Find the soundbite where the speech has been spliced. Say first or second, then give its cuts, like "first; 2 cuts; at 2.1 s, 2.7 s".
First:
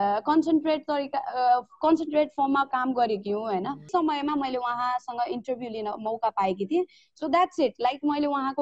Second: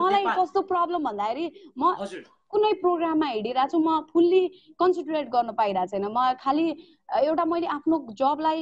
first; 1 cut; at 3.9 s